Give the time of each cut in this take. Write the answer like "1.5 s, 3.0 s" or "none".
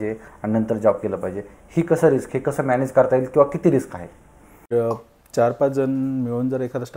4.7 s